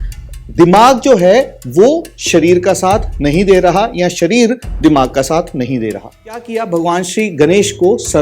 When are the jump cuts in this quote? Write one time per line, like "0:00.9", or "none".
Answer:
0:06.6